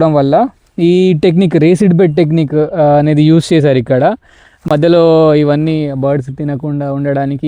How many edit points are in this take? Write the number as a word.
zero